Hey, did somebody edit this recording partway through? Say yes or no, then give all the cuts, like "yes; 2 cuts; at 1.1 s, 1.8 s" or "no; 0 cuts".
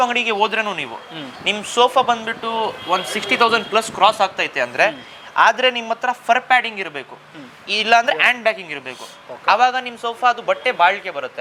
no; 0 cuts